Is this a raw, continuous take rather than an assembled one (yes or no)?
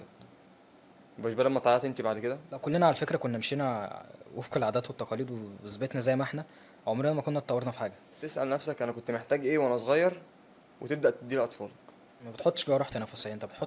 no